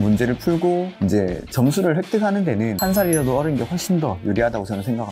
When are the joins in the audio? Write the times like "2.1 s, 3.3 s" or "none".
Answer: 0.9 s, 2.8 s